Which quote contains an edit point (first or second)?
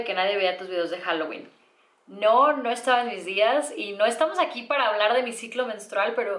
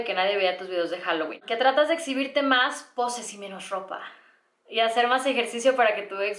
second